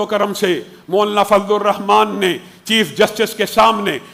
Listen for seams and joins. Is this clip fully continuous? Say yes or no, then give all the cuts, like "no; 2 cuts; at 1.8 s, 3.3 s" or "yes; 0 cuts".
yes; 0 cuts